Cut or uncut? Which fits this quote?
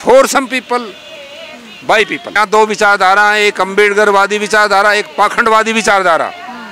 cut